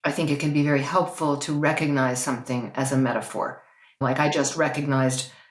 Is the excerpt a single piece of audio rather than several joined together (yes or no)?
no